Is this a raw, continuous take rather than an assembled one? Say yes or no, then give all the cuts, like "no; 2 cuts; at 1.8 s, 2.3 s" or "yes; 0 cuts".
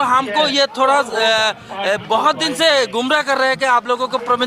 yes; 0 cuts